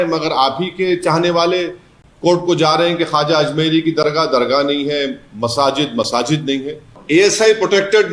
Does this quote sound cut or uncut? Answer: cut